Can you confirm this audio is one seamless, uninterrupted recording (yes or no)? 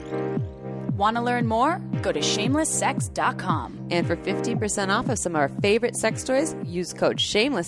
no